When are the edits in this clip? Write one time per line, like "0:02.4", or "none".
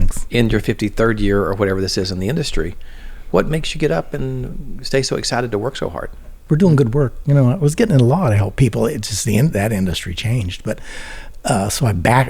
0:06.4